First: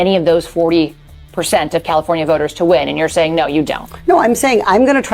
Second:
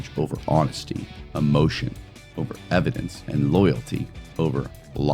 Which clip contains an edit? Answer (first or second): second